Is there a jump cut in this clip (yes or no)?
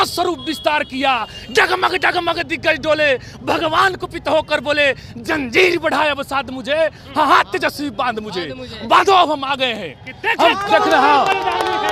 no